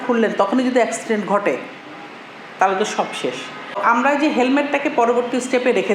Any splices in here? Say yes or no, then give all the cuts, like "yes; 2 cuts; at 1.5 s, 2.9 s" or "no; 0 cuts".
yes; 1 cut; at 3.8 s